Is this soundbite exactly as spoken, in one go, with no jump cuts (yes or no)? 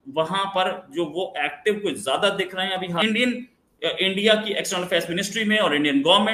no